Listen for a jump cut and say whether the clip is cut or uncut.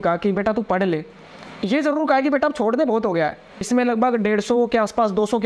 cut